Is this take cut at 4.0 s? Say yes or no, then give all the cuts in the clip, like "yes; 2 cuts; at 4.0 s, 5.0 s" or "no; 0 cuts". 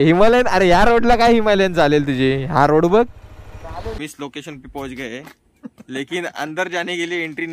yes; 1 cut; at 4.0 s